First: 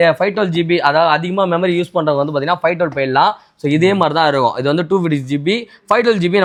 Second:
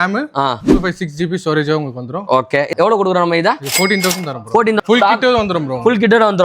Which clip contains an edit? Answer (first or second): second